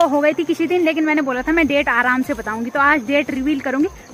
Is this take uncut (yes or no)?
yes